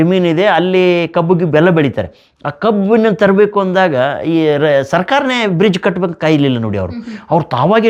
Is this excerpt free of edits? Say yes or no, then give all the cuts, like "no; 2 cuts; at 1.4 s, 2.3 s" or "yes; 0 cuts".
yes; 0 cuts